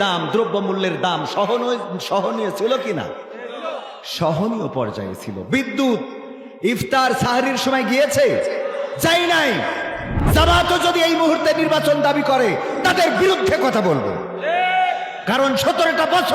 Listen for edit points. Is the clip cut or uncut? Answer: cut